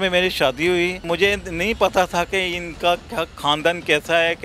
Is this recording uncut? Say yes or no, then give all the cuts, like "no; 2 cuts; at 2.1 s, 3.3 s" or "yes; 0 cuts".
no; 1 cut; at 1.0 s